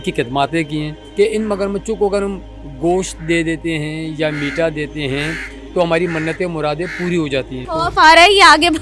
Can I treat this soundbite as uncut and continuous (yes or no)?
no